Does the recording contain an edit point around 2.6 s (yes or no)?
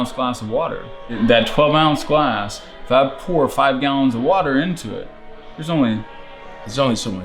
no